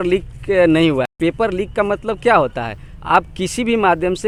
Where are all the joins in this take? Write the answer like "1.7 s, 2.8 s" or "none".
none